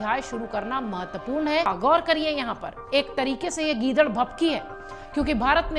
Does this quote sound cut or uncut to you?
cut